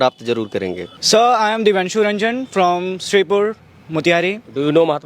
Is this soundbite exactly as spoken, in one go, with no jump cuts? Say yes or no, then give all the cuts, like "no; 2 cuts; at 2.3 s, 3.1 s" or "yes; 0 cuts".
no; 1 cut; at 1.0 s